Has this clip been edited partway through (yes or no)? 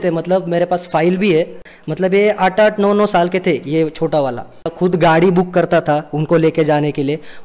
yes